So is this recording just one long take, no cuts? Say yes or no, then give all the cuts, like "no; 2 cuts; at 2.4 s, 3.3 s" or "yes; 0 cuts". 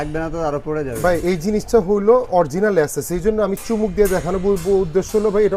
yes; 0 cuts